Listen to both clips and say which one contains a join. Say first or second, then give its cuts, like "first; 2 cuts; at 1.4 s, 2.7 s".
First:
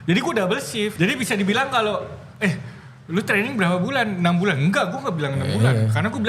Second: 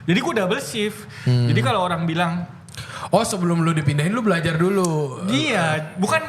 first; 1 cut; at 0.9 s